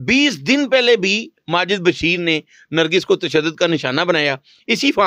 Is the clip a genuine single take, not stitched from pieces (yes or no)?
yes